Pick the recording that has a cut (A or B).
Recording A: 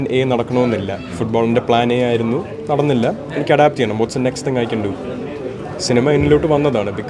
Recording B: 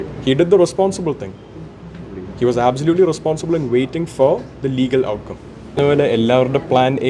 B